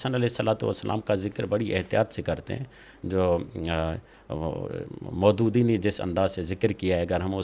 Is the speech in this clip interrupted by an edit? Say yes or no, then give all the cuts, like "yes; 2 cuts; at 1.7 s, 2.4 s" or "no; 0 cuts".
no; 0 cuts